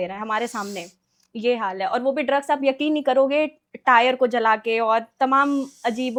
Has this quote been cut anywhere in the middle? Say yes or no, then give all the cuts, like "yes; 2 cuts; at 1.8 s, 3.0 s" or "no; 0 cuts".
no; 0 cuts